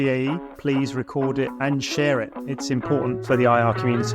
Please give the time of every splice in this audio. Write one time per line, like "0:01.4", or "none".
0:01.5
0:03.2